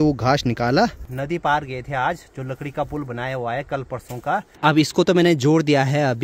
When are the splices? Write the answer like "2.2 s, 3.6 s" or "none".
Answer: 1.1 s, 4.5 s